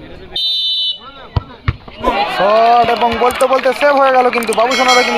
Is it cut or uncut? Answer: cut